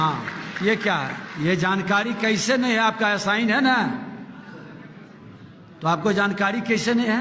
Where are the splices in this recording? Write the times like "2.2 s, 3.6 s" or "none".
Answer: 1.2 s